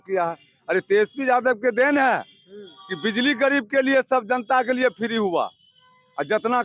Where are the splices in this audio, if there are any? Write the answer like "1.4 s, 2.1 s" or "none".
none